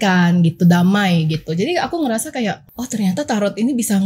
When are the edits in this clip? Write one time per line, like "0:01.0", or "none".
0:02.7